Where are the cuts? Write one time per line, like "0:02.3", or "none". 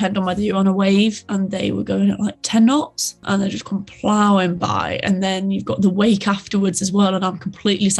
0:01.2
0:03.2